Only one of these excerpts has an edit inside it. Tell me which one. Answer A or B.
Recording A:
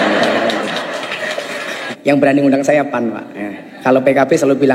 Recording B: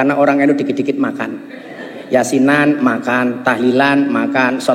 A